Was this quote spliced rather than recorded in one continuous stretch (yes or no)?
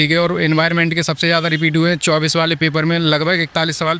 no